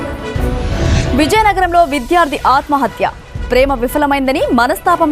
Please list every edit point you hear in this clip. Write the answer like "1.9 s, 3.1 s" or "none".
1.1 s

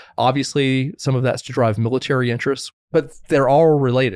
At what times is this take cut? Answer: 2.6 s

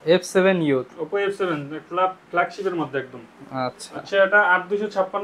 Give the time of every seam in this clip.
none

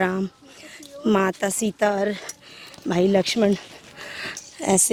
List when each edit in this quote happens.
none

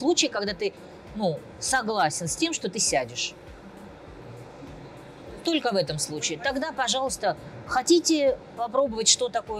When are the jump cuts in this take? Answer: none

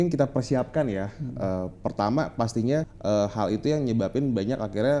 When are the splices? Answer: 2.9 s

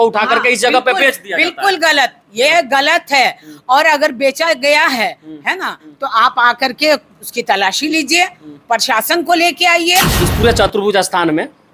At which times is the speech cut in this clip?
10.1 s

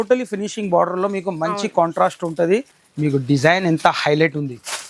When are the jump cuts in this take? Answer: 2.8 s

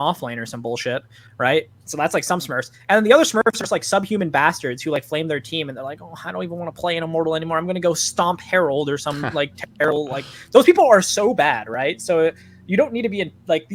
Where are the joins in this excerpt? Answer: none

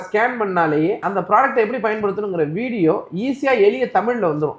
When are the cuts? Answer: 1.1 s

